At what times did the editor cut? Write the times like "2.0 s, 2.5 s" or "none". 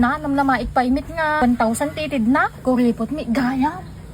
1.4 s, 2.5 s